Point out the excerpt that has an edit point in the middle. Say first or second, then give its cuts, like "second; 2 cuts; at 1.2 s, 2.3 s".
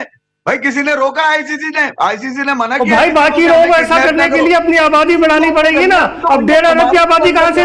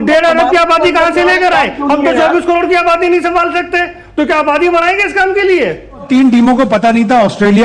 second; 1 cut; at 6.0 s